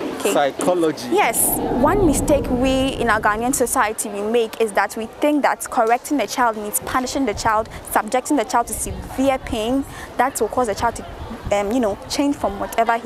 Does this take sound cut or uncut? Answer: cut